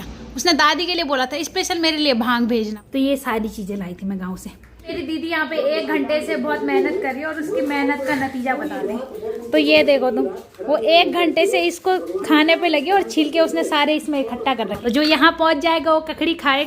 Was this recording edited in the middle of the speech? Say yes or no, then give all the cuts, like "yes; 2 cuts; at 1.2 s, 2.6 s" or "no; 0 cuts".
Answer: yes; 3 cuts; at 2.8 s, 4.9 s, 14.7 s